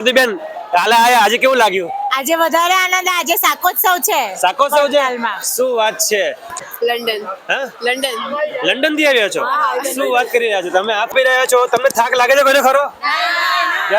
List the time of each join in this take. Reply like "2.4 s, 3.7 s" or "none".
6.5 s, 11.1 s